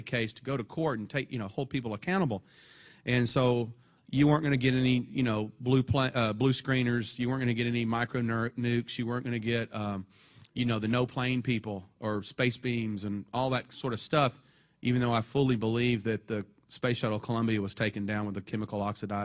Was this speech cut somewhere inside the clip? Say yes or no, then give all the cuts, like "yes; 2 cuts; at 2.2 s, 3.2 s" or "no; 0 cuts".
no; 0 cuts